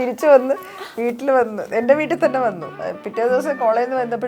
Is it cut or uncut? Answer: cut